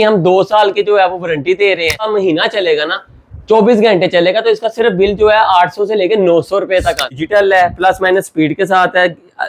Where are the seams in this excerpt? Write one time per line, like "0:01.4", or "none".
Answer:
0:02.1
0:07.1